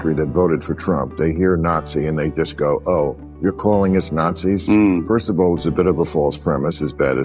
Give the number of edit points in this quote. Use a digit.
0